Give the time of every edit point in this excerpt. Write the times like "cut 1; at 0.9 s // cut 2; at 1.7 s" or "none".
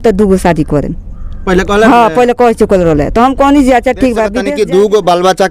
cut 1; at 4.4 s